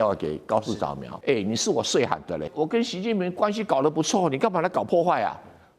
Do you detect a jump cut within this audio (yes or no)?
yes